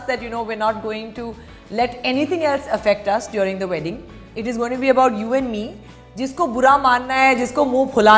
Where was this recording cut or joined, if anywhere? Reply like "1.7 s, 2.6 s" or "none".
none